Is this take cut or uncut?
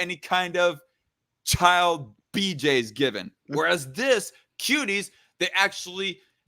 cut